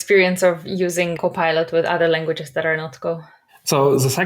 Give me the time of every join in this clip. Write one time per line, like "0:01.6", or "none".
0:01.1